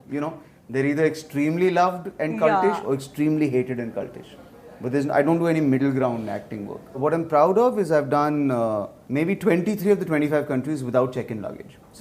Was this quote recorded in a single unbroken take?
no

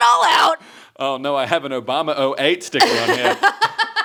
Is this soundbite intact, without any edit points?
yes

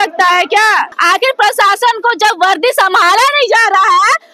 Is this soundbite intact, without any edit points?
no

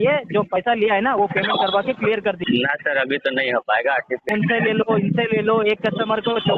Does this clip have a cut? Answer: yes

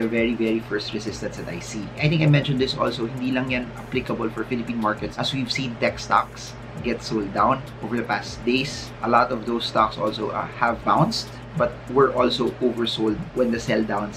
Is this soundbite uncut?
yes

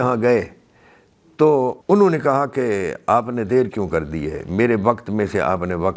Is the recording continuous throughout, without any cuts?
no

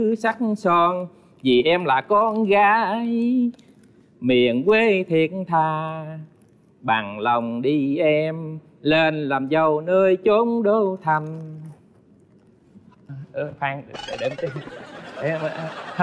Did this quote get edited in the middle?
no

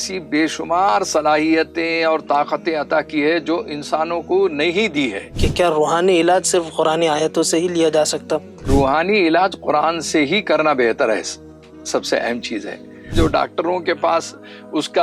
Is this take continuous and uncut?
no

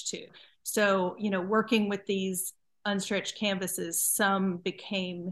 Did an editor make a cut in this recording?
no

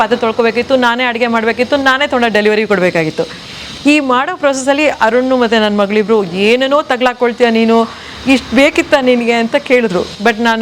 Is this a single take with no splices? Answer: yes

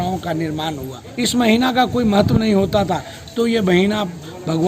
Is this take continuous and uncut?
no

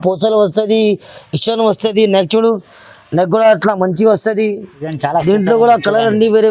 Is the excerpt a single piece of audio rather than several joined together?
no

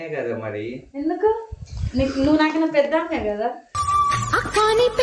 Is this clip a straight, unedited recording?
no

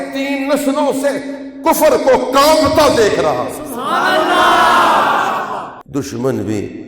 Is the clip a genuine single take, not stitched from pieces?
no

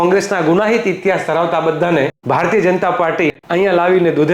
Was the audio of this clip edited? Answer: yes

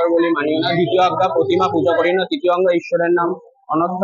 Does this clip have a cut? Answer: no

